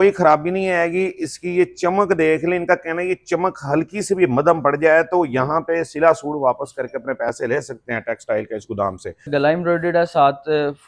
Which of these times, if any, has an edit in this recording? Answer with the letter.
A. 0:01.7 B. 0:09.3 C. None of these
B